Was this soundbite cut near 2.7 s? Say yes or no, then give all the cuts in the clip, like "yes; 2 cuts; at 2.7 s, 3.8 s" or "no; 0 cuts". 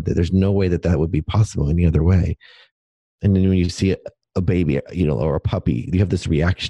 yes; 2 cuts; at 2.7 s, 4.2 s